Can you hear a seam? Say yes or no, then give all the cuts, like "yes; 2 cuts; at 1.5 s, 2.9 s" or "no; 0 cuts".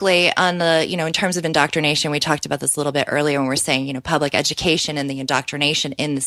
no; 0 cuts